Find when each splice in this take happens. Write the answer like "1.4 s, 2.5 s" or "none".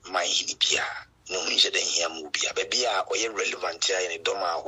none